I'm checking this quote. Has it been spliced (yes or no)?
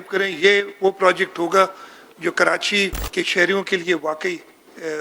yes